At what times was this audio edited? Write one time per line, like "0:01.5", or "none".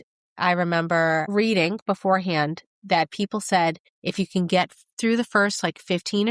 none